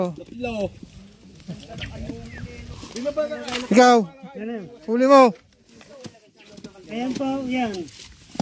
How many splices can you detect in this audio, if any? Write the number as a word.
one